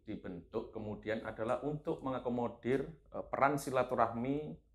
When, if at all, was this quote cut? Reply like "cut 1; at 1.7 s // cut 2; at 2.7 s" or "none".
none

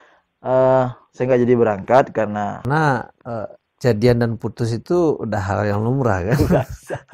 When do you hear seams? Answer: cut 1; at 2.6 s

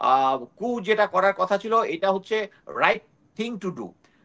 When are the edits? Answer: none

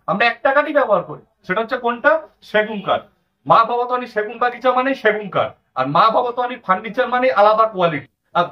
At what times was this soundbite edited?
none

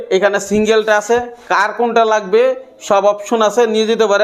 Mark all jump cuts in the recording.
none

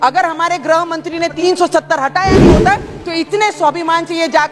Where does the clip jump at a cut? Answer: cut 1; at 1.4 s

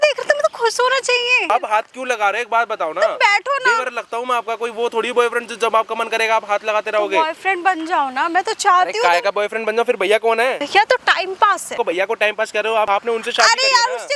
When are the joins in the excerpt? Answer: cut 1; at 1.5 s // cut 2; at 10.6 s // cut 3; at 11.7 s // cut 4; at 12.9 s

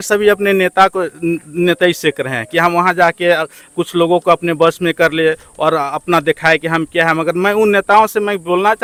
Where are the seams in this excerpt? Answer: none

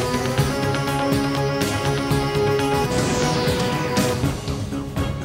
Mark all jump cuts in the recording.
cut 1; at 4.1 s

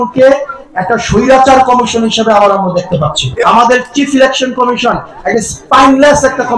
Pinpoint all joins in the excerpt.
cut 1; at 3.4 s

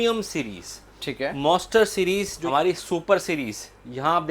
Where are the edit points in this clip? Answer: cut 1; at 2.4 s

